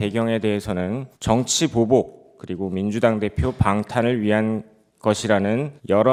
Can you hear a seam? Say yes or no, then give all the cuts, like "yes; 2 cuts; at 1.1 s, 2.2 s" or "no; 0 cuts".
no; 0 cuts